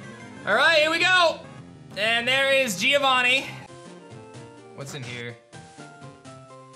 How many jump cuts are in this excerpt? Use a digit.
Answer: 1